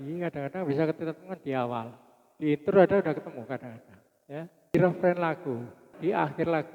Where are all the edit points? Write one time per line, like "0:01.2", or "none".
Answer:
0:04.7
0:06.0